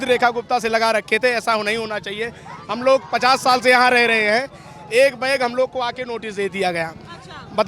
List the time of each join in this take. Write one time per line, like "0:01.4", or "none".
none